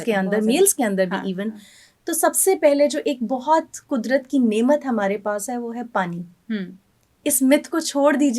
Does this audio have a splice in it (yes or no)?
no